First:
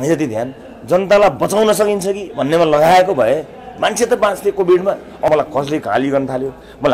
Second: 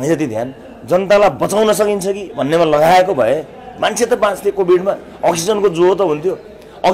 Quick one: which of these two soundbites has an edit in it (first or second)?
first